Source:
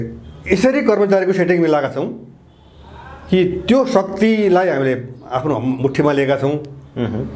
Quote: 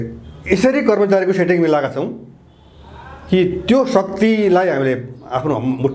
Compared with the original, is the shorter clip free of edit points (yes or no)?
yes